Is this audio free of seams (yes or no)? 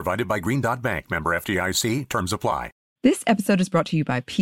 no